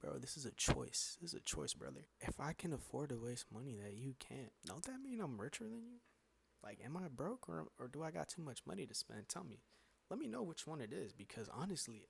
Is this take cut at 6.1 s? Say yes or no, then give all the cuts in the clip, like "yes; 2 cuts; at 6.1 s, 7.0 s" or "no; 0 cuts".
no; 1 cut; at 2.1 s